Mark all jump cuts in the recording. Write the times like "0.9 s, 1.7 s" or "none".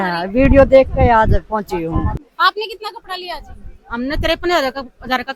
2.2 s